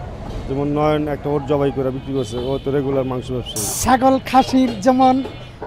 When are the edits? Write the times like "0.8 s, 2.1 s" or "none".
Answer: 3.8 s